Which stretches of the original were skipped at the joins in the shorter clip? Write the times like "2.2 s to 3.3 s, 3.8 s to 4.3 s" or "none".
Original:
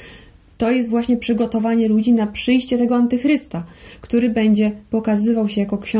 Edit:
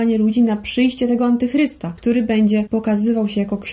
3.6 s to 3.9 s, 4.7 s to 4.9 s